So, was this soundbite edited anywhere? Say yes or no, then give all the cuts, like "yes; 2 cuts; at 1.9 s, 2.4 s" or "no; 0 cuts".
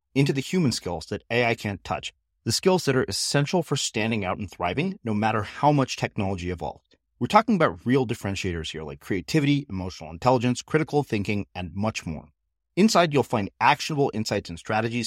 no; 0 cuts